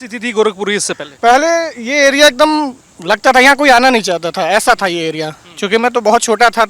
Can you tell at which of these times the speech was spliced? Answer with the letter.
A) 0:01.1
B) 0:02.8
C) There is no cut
A